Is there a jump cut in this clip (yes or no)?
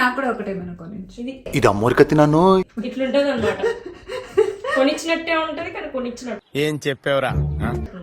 no